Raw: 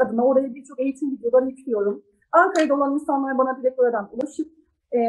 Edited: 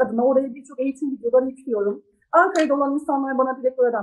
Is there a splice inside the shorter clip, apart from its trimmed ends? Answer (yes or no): no